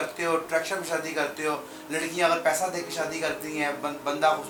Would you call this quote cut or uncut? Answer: uncut